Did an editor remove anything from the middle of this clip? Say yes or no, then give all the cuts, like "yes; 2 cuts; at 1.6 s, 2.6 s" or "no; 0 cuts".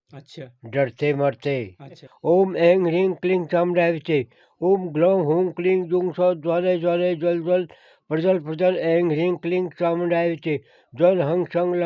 yes; 1 cut; at 2.1 s